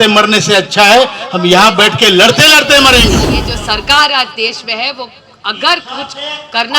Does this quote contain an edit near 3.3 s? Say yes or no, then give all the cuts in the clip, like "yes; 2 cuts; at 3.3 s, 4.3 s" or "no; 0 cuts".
yes; 1 cut; at 3.3 s